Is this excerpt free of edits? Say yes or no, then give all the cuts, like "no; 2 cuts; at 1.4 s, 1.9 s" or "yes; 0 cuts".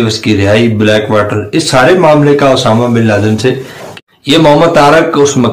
no; 1 cut; at 3.8 s